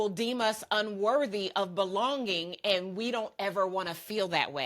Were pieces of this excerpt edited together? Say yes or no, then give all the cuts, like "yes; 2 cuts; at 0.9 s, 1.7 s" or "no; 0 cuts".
no; 0 cuts